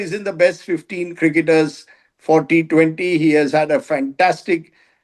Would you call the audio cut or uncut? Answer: uncut